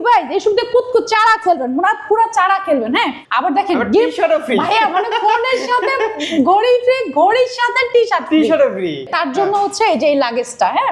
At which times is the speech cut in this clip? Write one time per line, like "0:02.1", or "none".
0:03.2
0:09.1